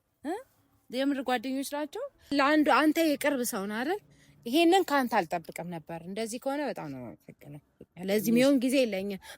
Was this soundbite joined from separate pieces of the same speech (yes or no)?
yes